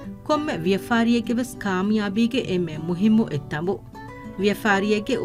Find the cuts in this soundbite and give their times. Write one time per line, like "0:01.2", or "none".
none